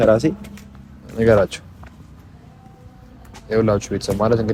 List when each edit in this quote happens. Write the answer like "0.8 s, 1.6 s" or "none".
none